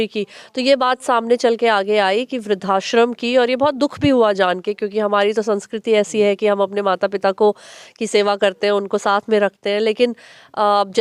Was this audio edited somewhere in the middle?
no; 0 cuts

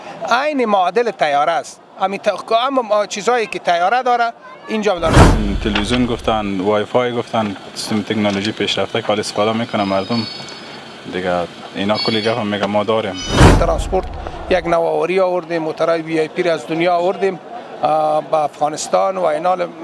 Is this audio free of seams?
no; 2 cuts; at 5.2 s, 13.4 s

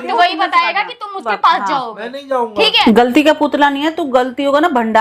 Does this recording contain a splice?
yes; 1 cut; at 2.8 s

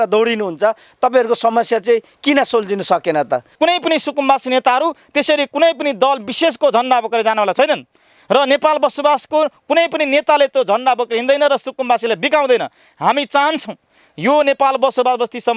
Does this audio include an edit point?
no; 0 cuts

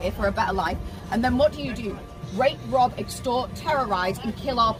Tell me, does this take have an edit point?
no; 0 cuts

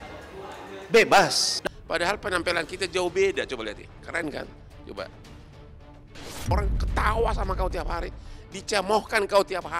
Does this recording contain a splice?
yes; 1 cut; at 1.5 s

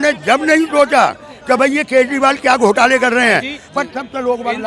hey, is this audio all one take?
yes; 0 cuts

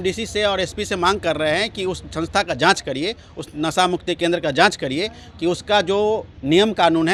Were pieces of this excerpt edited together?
no; 0 cuts

